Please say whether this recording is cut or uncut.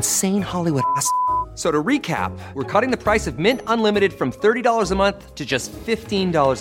uncut